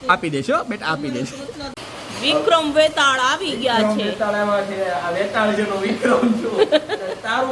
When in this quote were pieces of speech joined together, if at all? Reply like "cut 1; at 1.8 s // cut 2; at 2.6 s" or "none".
cut 1; at 1.6 s